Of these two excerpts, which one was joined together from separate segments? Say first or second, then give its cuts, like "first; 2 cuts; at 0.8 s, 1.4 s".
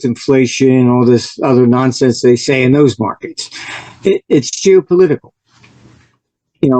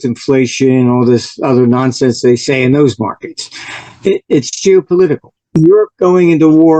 second; 1 cut; at 5.3 s